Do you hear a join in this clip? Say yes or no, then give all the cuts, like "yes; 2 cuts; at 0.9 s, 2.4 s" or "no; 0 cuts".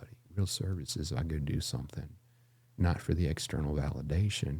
no; 0 cuts